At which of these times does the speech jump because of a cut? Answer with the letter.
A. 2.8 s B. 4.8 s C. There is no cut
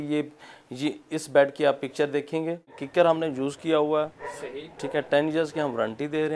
A